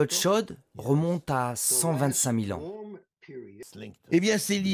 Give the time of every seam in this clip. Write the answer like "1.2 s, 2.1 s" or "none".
3.7 s